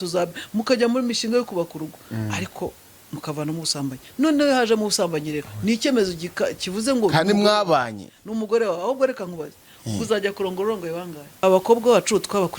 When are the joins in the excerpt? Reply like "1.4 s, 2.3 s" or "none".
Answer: 11.2 s